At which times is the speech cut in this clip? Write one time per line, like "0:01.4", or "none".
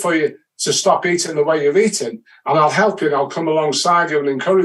none